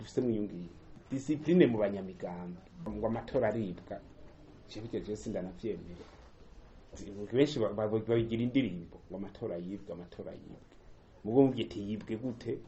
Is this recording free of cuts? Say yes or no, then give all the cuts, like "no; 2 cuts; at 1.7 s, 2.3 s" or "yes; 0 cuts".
no; 2 cuts; at 0.9 s, 2.9 s